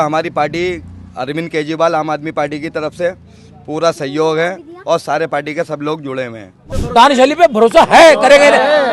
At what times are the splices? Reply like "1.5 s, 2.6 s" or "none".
6.6 s